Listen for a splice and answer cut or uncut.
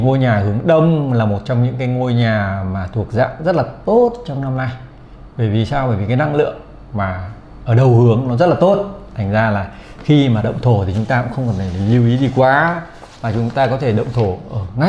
uncut